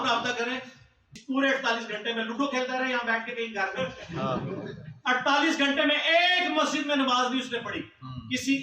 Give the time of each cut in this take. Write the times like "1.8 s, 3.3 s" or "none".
1.1 s